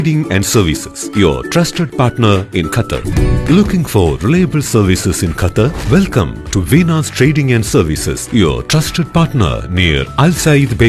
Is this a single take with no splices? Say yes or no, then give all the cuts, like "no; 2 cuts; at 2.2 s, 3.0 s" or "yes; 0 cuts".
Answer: no; 1 cut; at 0.9 s